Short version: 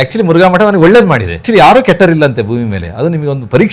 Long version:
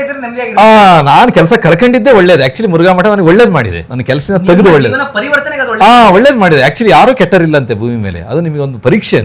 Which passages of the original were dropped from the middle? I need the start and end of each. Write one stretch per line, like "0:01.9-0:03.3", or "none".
0:03.9-0:06.8